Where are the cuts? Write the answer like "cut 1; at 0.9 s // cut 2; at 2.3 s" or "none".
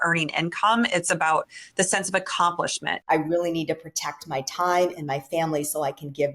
cut 1; at 2.9 s